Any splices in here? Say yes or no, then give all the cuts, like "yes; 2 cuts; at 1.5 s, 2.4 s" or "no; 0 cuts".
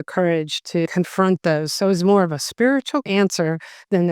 yes; 2 cuts; at 0.9 s, 3.1 s